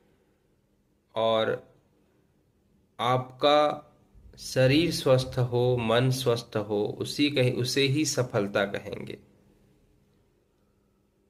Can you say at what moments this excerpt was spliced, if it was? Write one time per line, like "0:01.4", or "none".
none